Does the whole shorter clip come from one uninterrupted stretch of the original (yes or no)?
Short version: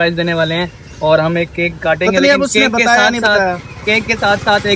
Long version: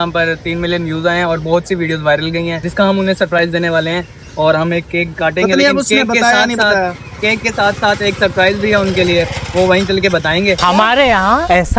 yes